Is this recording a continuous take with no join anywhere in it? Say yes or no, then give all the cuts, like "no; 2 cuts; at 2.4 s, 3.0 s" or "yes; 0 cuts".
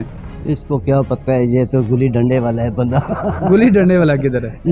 yes; 0 cuts